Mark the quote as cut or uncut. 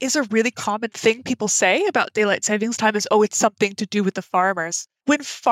cut